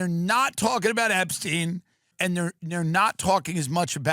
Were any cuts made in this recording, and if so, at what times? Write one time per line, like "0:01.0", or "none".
0:02.1